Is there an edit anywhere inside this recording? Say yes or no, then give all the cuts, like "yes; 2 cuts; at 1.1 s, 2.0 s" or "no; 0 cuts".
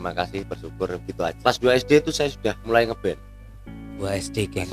yes; 2 cuts; at 1.4 s, 2.6 s